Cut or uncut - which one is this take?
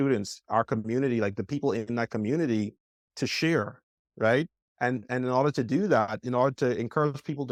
uncut